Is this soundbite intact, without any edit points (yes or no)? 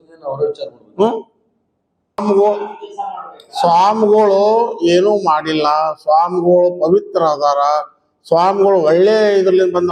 no